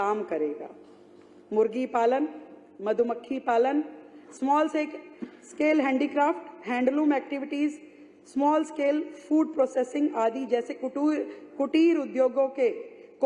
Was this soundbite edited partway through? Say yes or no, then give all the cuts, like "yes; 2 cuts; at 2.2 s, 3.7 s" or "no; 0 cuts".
no; 0 cuts